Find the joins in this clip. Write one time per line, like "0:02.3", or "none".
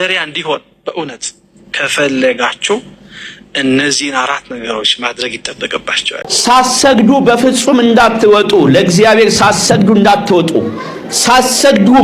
0:06.3